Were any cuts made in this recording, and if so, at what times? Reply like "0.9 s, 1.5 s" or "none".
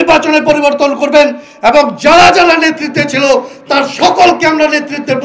none